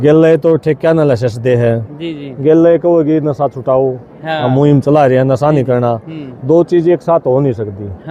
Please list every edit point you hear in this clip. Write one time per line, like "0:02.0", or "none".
none